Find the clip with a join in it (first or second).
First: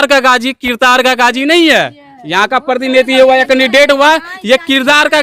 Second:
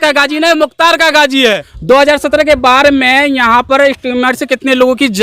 second